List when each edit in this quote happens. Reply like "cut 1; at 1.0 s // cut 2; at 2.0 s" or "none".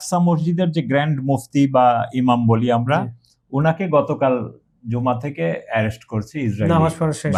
none